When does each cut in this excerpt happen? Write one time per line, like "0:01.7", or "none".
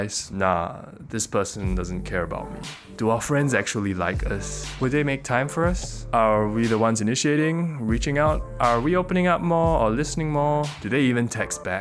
0:03.0
0:08.5